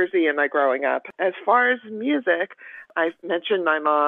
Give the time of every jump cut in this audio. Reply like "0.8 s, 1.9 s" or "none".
1.1 s, 2.9 s